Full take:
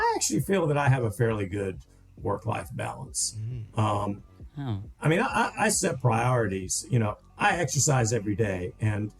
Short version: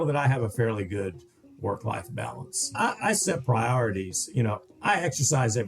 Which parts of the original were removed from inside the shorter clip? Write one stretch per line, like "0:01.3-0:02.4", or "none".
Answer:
0:03.4-0:05.3